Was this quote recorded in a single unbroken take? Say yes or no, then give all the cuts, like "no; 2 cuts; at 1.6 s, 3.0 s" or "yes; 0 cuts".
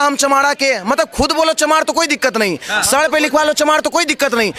yes; 0 cuts